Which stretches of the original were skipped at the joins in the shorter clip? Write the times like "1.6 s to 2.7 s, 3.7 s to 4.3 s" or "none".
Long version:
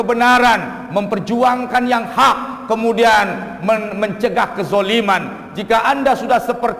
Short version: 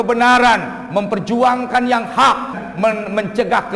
2.5 s to 3.4 s